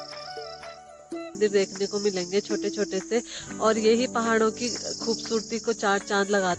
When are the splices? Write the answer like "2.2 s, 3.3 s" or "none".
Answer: 1.4 s